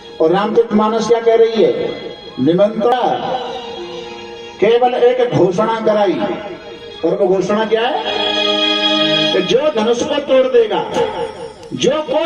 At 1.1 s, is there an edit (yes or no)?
no